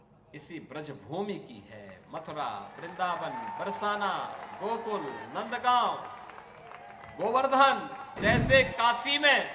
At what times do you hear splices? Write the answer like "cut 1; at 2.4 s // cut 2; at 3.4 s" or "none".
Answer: cut 1; at 8.1 s